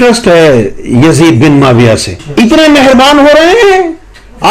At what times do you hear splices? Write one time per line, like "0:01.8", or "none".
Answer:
0:02.2

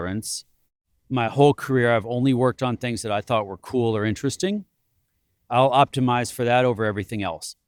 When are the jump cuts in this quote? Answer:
none

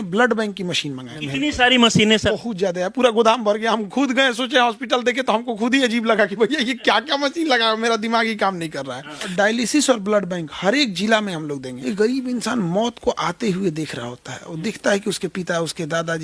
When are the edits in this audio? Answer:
0:01.1
0:02.3
0:09.2
0:11.7

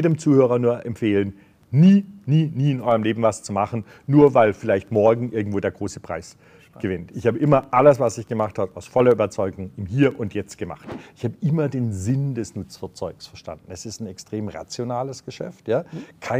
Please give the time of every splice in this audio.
0:11.0

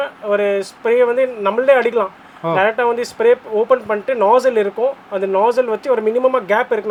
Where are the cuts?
none

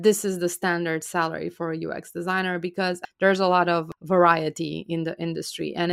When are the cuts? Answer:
0:03.0
0:03.9

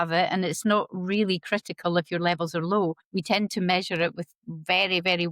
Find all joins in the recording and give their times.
0:03.0

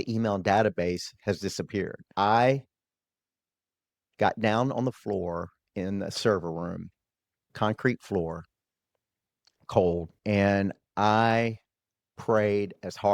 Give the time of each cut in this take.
0:02.0
0:10.1

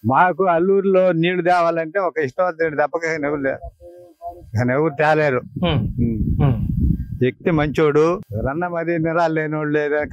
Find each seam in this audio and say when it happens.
0:08.3

